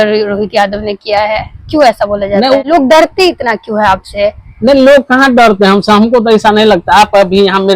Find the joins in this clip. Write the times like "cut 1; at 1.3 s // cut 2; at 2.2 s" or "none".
cut 1; at 2.6 s